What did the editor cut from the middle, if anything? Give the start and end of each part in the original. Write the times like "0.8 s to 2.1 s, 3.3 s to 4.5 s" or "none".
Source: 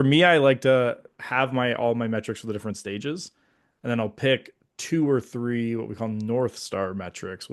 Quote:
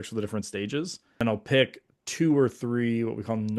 3.5 s to 3.9 s